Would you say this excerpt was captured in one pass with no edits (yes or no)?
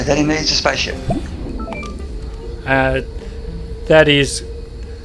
no